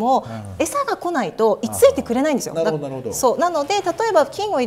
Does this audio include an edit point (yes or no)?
no